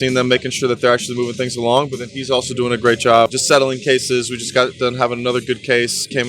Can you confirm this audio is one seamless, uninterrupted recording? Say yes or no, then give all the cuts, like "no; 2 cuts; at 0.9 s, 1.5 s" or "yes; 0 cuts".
no; 1 cut; at 3.3 s